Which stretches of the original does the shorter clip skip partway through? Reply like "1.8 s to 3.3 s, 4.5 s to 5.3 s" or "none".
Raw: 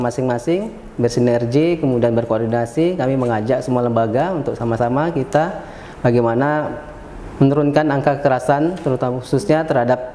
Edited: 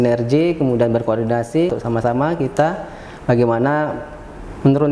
2.9 s to 4.5 s